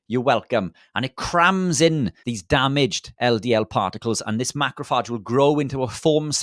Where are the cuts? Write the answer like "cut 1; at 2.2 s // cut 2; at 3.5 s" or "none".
cut 1; at 2.2 s